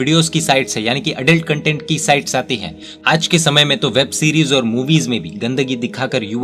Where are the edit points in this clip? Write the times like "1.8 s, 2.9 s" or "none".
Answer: 2.9 s